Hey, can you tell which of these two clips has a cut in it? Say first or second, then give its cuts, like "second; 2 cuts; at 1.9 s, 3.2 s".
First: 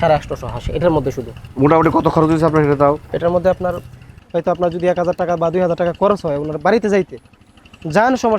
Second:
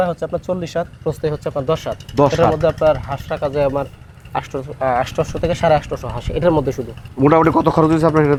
first; 1 cut; at 4.1 s